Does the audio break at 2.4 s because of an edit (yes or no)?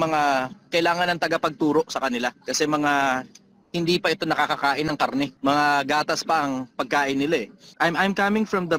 no